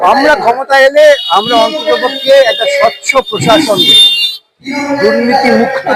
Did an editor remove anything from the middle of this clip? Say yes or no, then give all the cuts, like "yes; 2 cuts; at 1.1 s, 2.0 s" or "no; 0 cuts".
no; 0 cuts